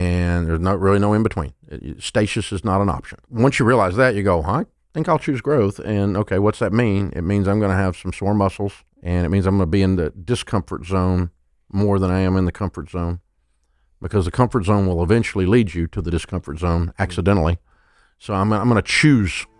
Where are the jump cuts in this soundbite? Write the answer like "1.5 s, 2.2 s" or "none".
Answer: 3.2 s, 8.9 s